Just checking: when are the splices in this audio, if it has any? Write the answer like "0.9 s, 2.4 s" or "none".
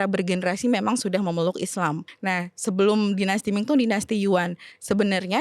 2.1 s